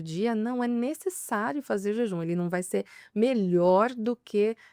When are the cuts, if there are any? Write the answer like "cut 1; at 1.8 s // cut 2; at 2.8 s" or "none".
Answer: none